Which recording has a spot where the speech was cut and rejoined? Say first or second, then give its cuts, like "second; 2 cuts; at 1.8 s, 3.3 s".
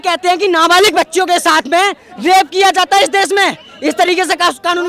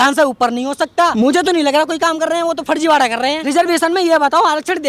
second; 2 cuts; at 1.1 s, 3.4 s